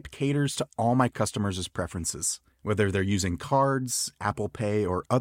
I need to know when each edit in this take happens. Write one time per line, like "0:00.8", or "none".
none